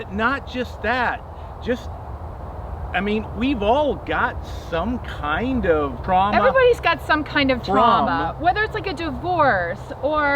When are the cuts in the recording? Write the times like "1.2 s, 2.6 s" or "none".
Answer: 6.0 s